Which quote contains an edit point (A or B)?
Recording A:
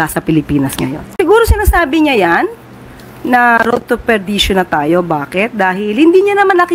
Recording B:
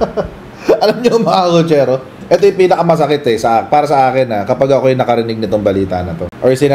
A